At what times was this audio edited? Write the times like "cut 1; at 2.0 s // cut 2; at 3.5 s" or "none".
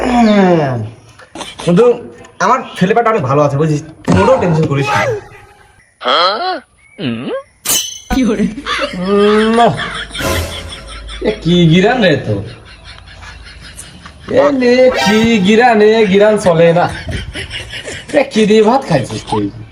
none